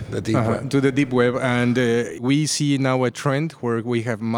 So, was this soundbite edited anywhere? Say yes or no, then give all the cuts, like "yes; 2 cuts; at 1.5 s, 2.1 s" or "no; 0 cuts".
yes; 1 cut; at 2.1 s